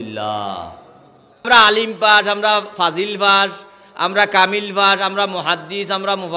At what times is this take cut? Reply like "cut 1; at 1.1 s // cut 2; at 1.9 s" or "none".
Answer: cut 1; at 1.4 s